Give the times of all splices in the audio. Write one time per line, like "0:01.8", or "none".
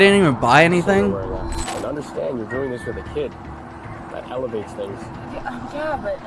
0:01.6